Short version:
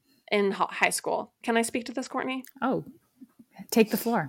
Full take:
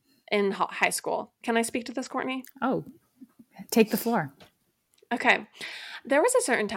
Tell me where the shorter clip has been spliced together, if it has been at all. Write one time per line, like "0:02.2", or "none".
none